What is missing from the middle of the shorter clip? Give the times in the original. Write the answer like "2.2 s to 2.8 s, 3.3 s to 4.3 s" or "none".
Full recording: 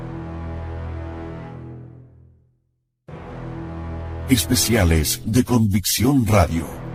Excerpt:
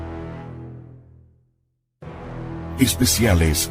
3.8 s to 4.3 s